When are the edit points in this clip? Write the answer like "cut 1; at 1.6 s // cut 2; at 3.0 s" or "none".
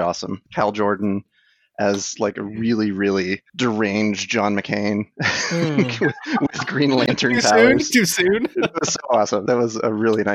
cut 1; at 3.5 s // cut 2; at 9.4 s